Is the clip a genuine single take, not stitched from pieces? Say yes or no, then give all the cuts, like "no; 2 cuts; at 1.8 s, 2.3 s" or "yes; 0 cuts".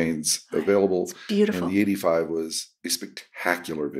yes; 0 cuts